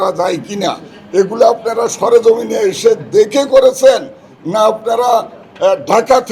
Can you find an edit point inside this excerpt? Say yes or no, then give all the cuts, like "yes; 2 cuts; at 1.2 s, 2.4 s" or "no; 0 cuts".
no; 0 cuts